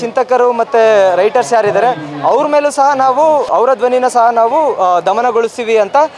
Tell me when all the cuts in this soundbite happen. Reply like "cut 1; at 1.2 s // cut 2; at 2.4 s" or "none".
cut 1; at 3.5 s